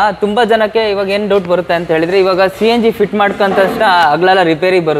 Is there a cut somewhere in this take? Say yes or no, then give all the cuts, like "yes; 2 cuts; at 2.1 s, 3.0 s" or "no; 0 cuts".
no; 0 cuts